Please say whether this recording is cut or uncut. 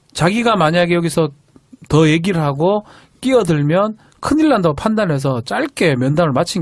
cut